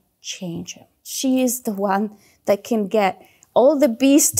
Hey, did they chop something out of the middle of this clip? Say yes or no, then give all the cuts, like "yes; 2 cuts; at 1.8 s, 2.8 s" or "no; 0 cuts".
yes; 1 cut; at 1.1 s